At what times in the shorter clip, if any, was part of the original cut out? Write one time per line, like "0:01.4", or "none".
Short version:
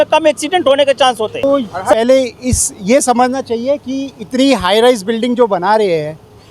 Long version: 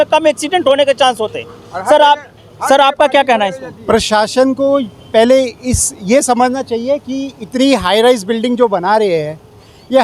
0:01.4